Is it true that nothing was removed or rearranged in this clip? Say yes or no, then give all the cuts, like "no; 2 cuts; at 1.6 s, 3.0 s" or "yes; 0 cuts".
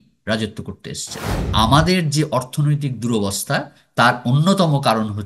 no; 1 cut; at 1.4 s